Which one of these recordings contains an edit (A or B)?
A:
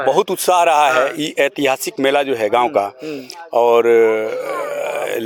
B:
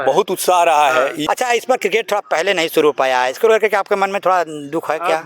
B